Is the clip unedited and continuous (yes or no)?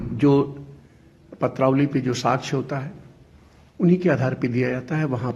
yes